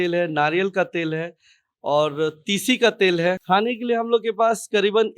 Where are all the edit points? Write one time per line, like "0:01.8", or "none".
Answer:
0:03.4